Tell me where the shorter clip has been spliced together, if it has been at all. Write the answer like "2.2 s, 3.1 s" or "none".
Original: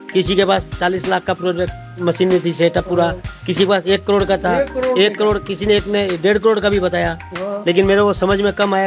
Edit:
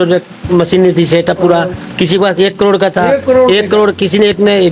none

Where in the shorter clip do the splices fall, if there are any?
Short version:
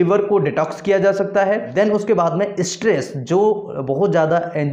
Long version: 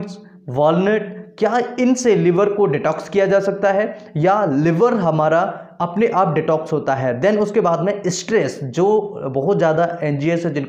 1.7 s

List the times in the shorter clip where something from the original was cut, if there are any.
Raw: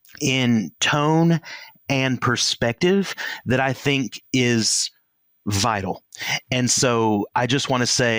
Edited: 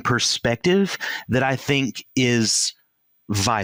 none

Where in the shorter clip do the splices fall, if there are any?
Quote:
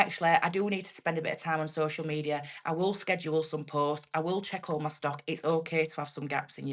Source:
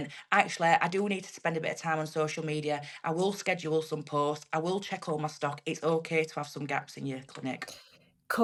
none

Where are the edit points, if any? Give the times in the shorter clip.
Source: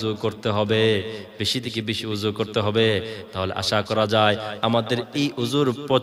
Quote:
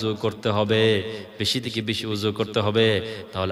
none

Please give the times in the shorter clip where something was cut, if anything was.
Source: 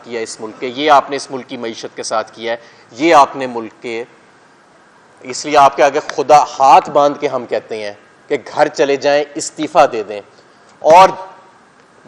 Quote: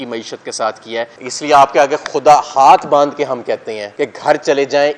1.2 s, 3.8 s

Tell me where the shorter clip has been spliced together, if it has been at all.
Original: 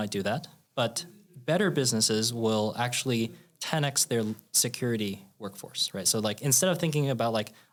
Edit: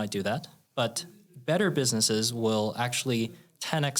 none

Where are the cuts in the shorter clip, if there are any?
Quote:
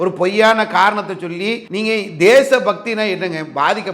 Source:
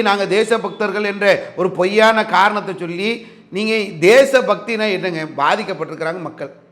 1.7 s

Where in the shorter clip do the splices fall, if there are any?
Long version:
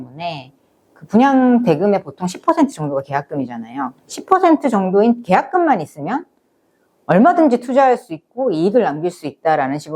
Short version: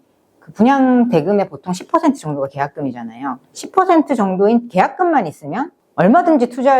5.8 s

